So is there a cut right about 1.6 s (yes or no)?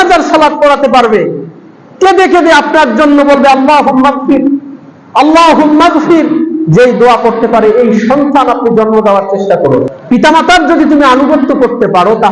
no